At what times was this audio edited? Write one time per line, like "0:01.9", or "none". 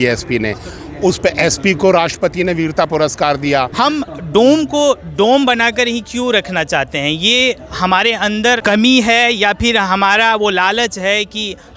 0:03.7
0:08.6